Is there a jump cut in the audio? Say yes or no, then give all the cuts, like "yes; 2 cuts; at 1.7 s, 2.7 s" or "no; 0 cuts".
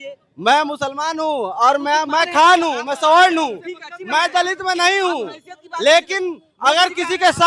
no; 0 cuts